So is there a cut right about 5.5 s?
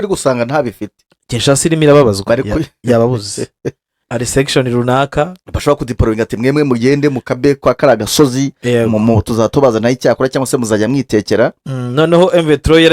no; 1 cut; at 4.0 s

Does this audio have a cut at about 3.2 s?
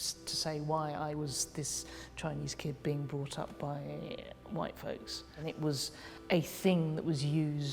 no; 1 cut; at 5.7 s

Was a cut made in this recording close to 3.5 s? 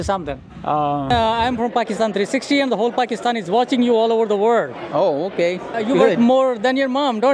no; 2 cuts; at 1.1 s, 6.0 s

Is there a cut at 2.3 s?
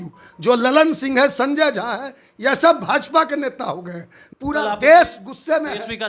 no; 1 cut; at 4.2 s

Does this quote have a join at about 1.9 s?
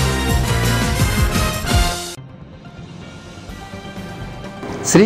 no; 1 cut; at 3.3 s

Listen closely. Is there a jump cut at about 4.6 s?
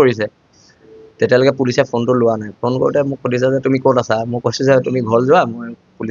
no; 0 cuts

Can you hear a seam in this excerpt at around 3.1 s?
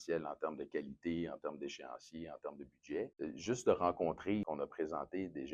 yes; 2 cuts; at 3.1 s, 4.5 s

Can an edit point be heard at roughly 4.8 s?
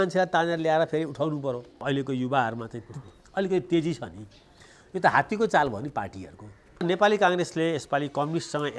no; 2 cuts; at 1.8 s, 6.8 s

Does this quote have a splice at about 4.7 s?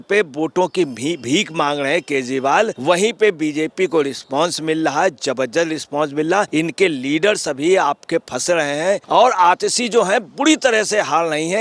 no; 3 cuts; at 2.8 s, 6.5 s, 9.0 s

